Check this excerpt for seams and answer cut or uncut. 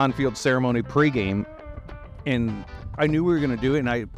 uncut